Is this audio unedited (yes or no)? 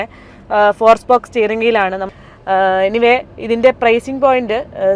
no